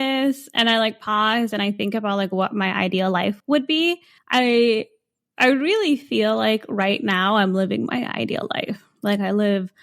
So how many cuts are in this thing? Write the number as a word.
two